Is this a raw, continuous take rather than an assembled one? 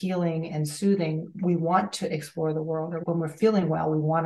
no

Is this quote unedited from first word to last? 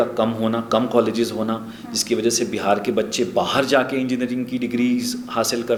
yes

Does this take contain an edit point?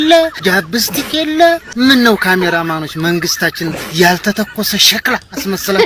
no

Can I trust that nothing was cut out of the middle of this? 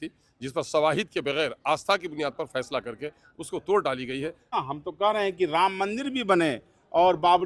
no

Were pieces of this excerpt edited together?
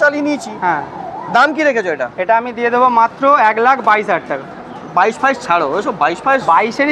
no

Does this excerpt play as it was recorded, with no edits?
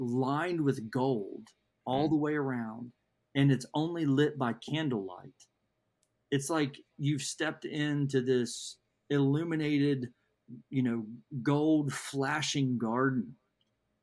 yes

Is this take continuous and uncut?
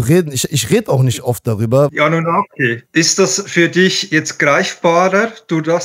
no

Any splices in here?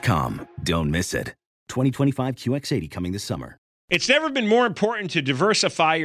yes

